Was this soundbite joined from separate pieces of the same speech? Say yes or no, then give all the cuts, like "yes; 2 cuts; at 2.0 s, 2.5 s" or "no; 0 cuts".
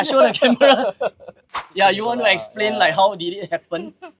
yes; 1 cut; at 1.6 s